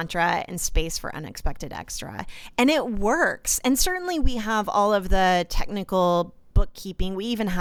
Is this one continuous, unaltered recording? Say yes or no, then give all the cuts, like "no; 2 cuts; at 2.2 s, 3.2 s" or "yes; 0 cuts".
yes; 0 cuts